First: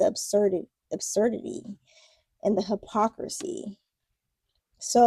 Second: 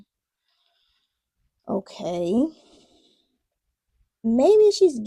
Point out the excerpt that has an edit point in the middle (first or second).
second